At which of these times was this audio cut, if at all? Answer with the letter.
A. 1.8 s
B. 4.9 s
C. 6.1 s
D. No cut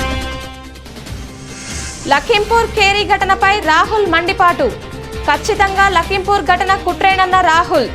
A